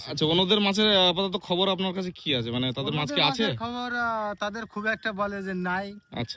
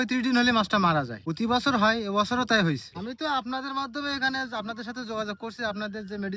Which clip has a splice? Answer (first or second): second